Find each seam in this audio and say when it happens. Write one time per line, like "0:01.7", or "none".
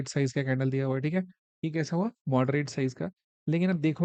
none